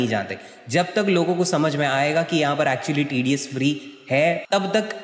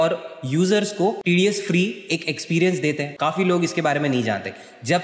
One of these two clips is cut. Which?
second; 2 cuts; at 1.2 s, 3.1 s

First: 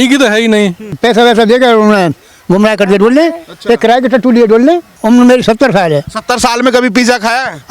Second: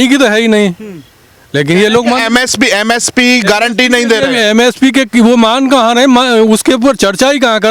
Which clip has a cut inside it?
first; 2 cuts; at 0.9 s, 4.9 s

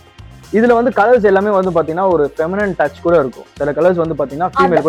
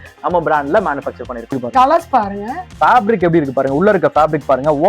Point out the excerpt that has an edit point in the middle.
second; 1 cut; at 1.6 s

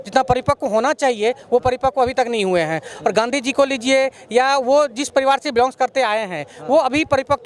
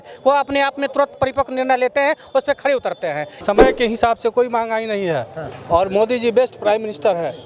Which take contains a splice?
second; 1 cut; at 3.4 s

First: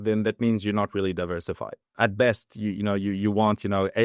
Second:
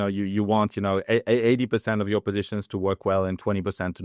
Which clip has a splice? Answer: first; 1 cut; at 1.9 s

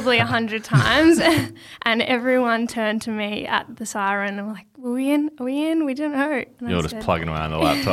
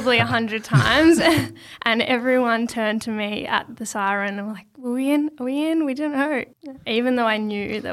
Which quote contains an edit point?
second; 1 cut; at 6.5 s

